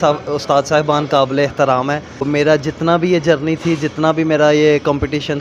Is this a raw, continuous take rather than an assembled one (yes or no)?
no